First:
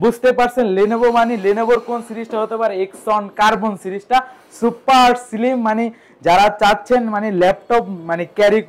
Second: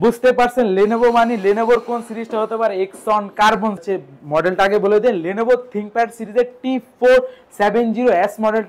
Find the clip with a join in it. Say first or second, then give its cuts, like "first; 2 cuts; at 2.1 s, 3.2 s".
second; 1 cut; at 3.8 s